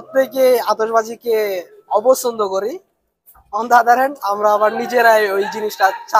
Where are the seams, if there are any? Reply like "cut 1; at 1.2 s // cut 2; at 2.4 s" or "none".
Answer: none